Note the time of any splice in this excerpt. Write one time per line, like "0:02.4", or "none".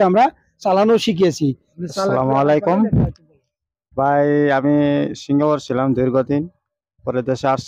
0:01.7